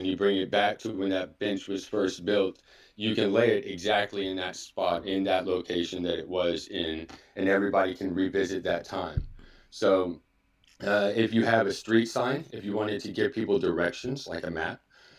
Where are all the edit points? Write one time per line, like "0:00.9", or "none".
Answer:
none